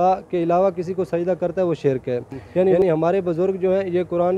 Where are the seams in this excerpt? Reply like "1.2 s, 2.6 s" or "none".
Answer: 2.8 s